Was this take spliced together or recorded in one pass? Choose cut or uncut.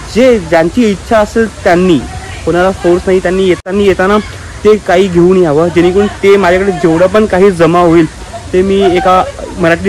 cut